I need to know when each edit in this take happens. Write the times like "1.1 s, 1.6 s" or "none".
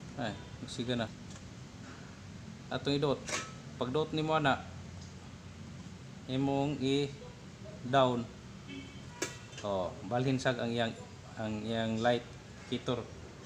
1.1 s